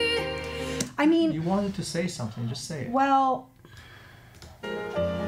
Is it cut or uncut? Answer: uncut